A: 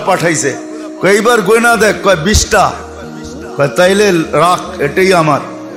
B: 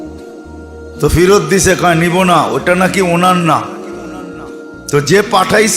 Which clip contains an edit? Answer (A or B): B